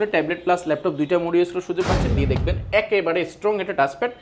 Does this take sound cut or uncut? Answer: cut